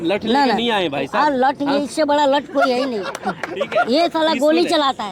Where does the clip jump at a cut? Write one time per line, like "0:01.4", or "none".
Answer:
none